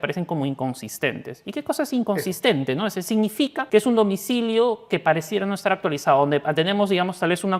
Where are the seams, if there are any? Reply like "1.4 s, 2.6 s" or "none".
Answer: 3.6 s

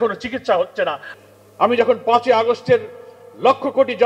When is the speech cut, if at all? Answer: 1.0 s

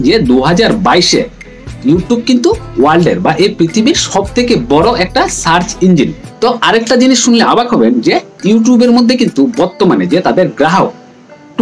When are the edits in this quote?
6.2 s

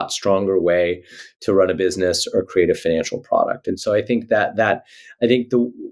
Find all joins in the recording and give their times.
none

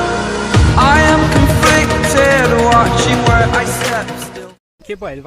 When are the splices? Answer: 4.3 s

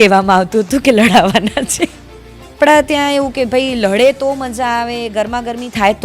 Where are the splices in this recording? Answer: 2.5 s

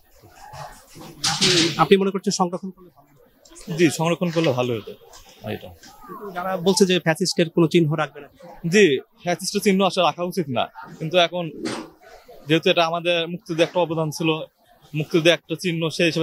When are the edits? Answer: none

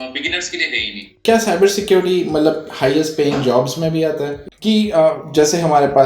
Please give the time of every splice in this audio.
1.2 s, 4.4 s

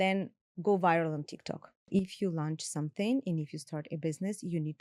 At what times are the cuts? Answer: 1.9 s

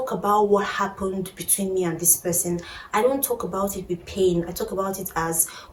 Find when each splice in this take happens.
none

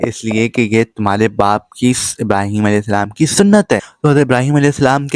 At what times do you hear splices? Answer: 3.9 s

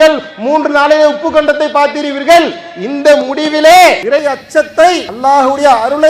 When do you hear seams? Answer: 4.0 s, 5.1 s

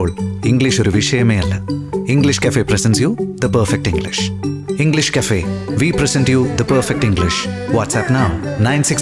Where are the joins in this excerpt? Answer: none

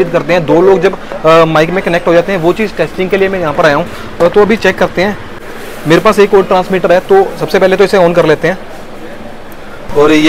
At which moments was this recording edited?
none

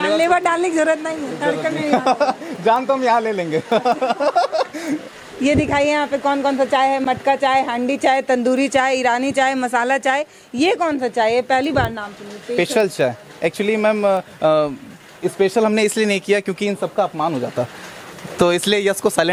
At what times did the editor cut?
none

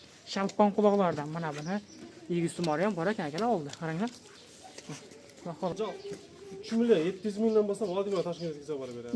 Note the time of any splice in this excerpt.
5.7 s

